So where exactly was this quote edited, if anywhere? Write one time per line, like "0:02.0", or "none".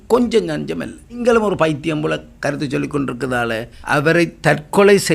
0:01.2
0:03.7